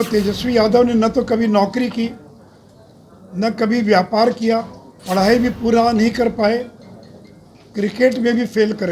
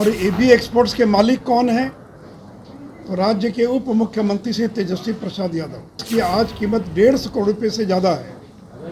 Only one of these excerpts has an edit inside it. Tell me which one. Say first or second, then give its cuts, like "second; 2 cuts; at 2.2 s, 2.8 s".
second; 1 cut; at 6.0 s